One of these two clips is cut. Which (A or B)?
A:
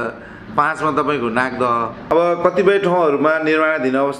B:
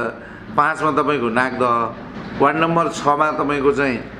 A